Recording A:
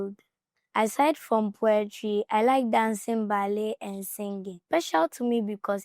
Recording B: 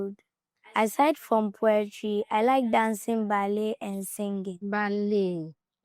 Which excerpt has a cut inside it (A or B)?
A